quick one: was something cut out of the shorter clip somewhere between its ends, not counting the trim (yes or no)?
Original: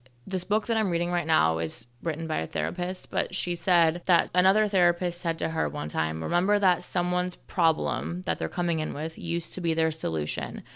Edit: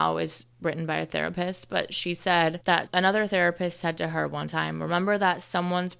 no